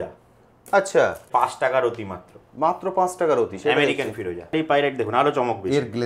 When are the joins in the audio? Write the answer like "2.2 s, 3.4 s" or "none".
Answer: 1.3 s, 4.5 s